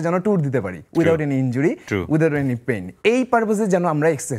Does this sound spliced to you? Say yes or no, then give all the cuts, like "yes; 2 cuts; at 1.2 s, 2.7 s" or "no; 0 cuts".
no; 0 cuts